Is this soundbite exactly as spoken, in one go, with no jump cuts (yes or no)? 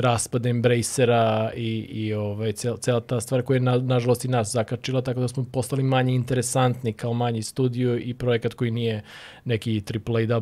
yes